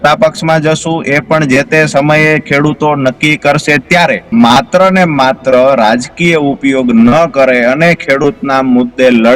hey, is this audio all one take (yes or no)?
no